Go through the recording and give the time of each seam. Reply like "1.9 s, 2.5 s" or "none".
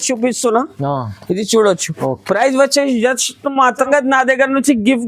3.9 s